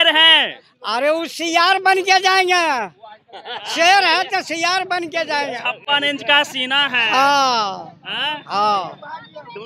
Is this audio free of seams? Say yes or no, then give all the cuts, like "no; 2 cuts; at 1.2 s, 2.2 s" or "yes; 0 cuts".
yes; 0 cuts